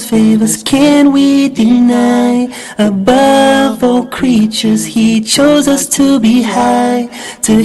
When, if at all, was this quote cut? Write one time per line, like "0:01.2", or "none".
0:06.7